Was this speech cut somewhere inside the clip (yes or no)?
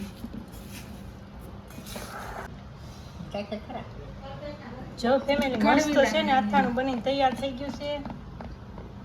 yes